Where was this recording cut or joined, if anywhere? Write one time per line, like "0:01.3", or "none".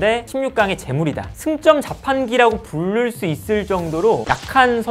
none